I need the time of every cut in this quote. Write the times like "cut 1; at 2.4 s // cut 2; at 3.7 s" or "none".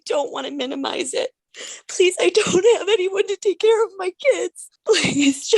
cut 1; at 1.5 s // cut 2; at 4.6 s